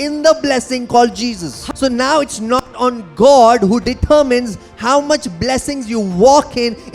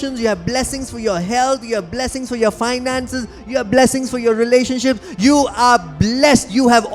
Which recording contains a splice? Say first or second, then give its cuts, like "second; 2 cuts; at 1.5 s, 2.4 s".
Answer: first; 1 cut; at 1.5 s